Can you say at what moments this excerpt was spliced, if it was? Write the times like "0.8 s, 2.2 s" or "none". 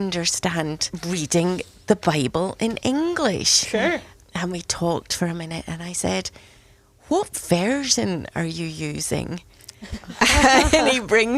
1.0 s, 4.2 s